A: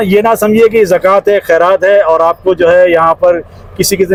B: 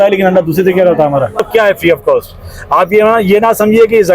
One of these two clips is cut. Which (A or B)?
B